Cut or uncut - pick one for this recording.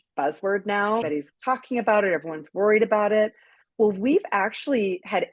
cut